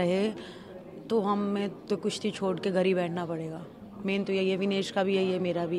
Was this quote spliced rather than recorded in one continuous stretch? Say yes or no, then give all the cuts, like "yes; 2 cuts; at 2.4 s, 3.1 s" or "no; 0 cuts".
no; 0 cuts